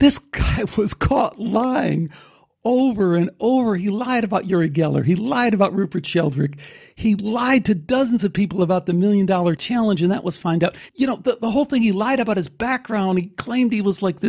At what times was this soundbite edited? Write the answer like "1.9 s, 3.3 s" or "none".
9.6 s, 10.8 s